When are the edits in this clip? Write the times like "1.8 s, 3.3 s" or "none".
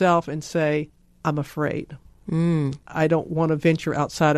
1.0 s